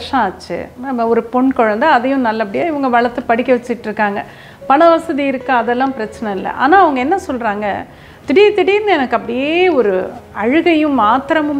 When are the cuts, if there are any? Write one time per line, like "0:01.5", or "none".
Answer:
none

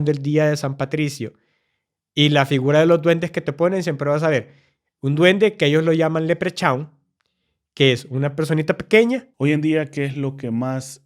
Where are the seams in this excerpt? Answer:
0:09.3

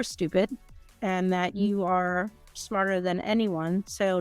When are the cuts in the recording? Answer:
0:00.9

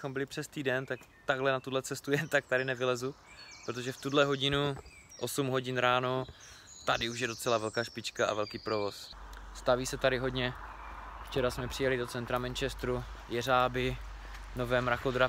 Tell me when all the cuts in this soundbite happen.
0:09.1

